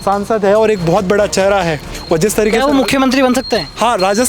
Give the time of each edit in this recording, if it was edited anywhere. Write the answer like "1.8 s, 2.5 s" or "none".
1.9 s